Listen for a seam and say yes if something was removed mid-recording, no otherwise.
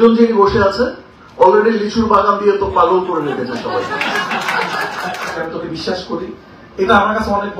yes